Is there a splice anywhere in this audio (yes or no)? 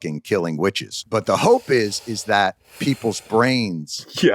yes